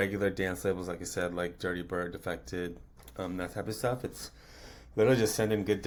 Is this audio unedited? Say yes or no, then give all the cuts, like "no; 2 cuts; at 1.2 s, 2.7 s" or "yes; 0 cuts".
yes; 0 cuts